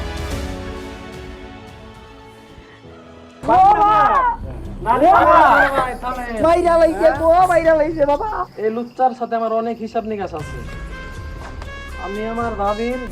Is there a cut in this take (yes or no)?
yes